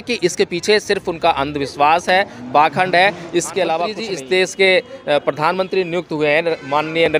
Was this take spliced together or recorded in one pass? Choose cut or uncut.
cut